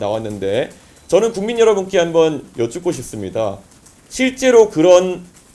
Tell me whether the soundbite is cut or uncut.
uncut